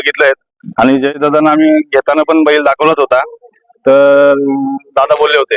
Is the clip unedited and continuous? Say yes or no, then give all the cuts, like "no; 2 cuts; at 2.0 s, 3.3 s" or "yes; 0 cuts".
yes; 0 cuts